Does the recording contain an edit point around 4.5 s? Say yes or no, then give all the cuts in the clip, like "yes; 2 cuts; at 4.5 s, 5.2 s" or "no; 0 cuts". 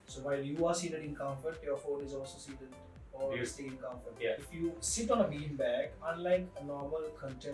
yes; 1 cut; at 4.5 s